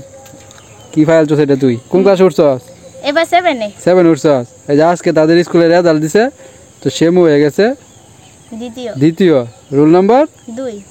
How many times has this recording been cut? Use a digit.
1